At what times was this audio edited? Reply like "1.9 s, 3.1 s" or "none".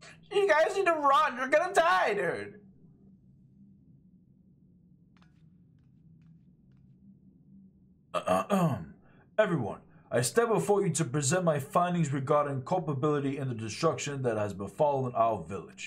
none